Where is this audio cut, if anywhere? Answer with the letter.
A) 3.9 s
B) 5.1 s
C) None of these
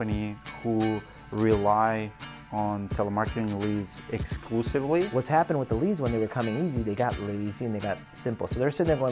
B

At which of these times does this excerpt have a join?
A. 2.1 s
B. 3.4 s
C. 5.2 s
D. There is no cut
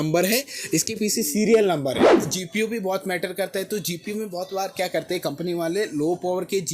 A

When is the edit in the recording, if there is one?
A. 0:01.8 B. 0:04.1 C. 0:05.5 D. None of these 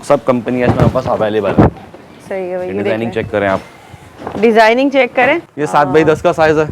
C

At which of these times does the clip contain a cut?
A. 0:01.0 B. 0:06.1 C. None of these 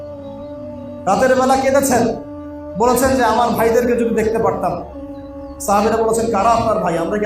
A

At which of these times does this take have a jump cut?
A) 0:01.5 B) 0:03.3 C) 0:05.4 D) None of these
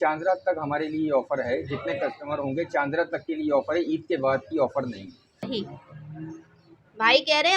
C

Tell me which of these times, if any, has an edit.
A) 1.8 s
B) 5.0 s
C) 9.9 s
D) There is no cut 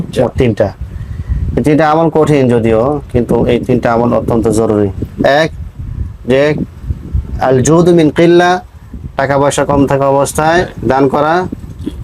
B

